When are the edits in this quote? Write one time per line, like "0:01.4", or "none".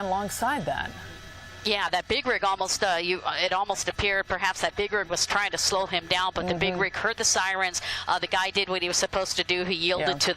0:07.5